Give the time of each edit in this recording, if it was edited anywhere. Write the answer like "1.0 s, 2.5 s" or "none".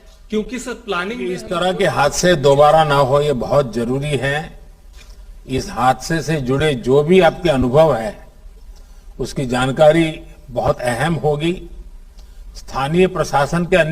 1.4 s